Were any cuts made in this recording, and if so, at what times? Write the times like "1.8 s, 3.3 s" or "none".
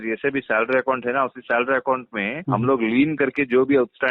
2.4 s